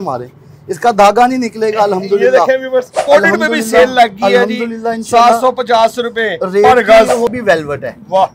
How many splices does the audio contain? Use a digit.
2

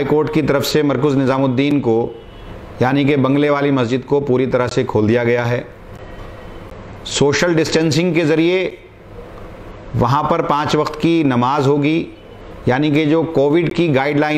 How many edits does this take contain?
0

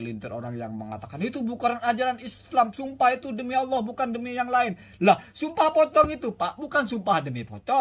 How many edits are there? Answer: 0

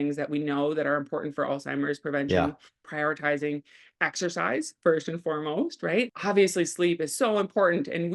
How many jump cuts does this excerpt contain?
2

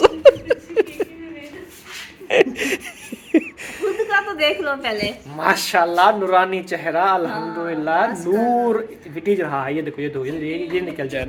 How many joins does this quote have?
0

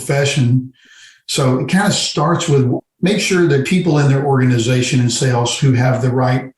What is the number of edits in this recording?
0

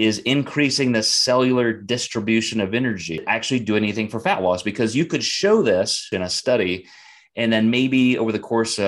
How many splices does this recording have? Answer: 2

